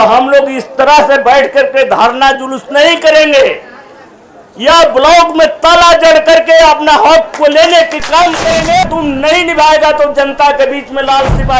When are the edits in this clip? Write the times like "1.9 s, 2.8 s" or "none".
8.8 s